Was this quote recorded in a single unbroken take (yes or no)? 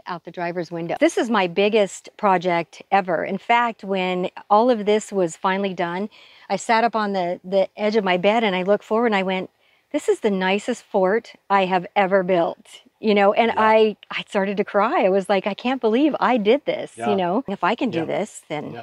no